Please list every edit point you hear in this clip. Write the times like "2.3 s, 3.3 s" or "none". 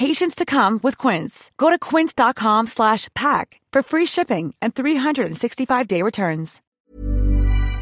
6.7 s